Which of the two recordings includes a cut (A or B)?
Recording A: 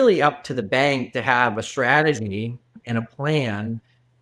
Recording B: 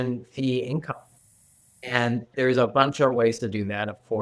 B